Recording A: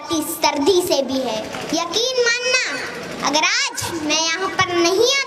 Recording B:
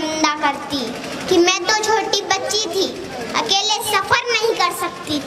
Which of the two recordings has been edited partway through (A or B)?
A